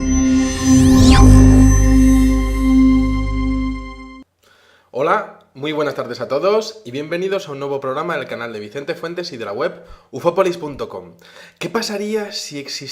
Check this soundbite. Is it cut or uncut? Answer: uncut